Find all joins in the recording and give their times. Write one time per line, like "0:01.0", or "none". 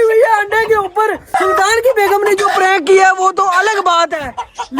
0:01.4